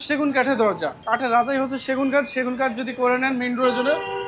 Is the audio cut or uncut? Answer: cut